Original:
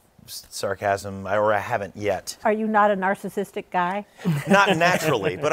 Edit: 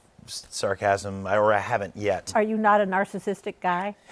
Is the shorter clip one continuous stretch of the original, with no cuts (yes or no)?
no